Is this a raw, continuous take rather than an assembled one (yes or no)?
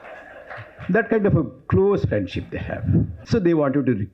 no